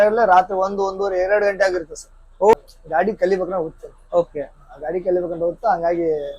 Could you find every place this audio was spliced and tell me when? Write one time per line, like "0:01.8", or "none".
0:02.5

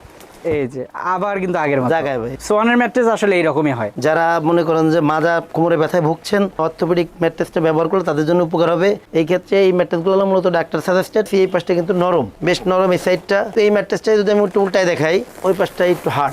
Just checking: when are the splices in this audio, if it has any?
0:02.3
0:03.9
0:11.3
0:13.5

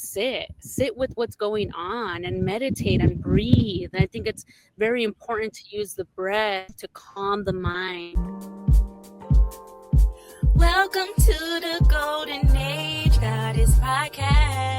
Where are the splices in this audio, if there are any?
0:08.2

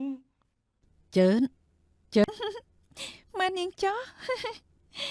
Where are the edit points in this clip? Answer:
0:02.2

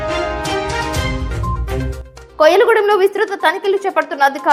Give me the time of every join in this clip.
none

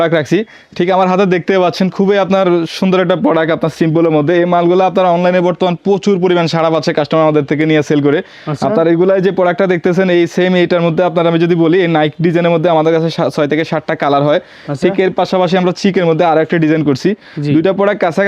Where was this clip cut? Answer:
none

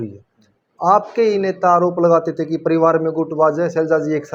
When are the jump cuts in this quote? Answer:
none

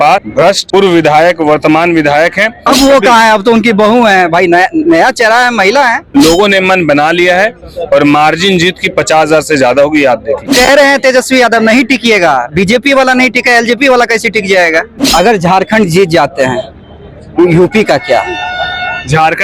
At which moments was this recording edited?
0:02.6
0:06.0
0:10.5
0:15.0

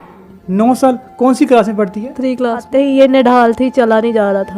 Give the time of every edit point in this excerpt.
0:02.7

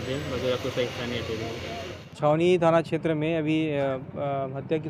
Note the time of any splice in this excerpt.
0:02.0

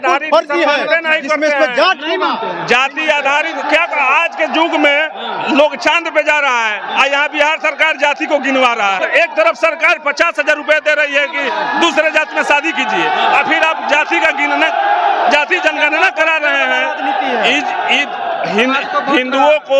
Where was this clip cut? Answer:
0:09.0

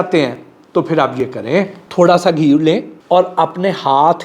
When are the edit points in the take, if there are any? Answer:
0:01.8
0:02.9

